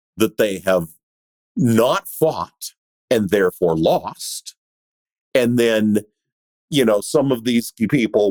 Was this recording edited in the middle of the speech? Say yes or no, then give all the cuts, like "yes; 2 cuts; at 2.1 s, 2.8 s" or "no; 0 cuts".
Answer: no; 0 cuts